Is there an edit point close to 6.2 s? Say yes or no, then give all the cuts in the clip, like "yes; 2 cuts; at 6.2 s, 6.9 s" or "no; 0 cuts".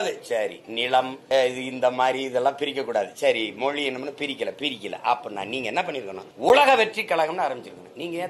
yes; 2 cuts; at 1.2 s, 6.2 s